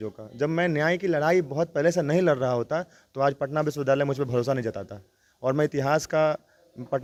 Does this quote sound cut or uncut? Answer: uncut